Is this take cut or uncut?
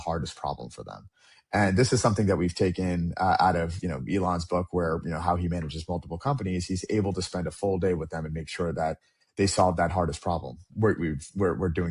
uncut